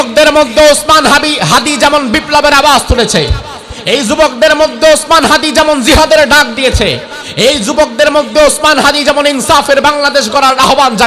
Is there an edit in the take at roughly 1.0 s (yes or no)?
no